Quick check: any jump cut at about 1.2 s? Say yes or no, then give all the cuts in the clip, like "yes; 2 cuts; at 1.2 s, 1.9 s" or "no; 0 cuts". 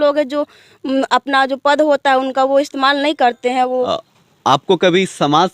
no; 1 cut; at 3.9 s